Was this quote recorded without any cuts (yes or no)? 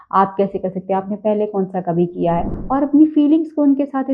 no